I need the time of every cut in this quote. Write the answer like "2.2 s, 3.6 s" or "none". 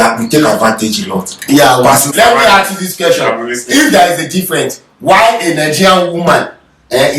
2.1 s